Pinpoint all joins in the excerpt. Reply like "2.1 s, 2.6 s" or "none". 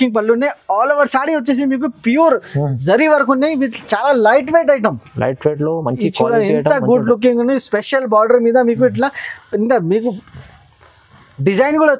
none